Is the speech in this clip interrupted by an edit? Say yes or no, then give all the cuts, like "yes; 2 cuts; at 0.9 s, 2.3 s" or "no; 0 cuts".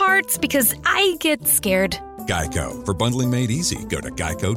no; 0 cuts